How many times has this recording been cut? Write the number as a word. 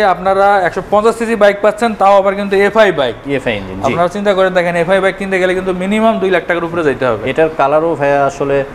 zero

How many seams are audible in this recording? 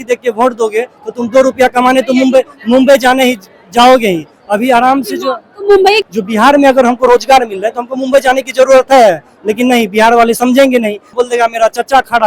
two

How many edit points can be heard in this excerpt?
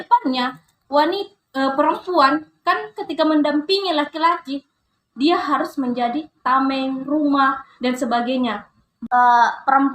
one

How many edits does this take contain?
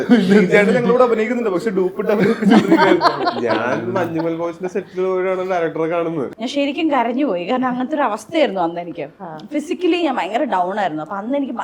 one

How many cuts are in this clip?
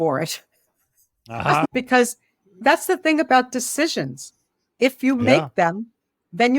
one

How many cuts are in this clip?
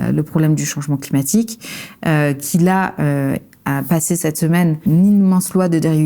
one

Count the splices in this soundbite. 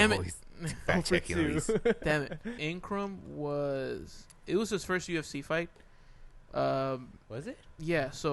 one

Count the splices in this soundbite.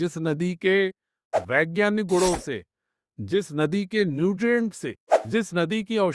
zero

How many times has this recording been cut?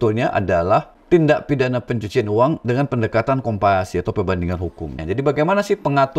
two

